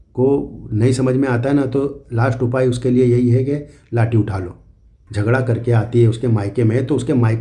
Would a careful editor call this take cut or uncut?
cut